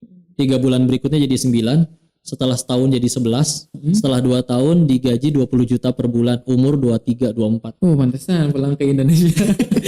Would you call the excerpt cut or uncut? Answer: uncut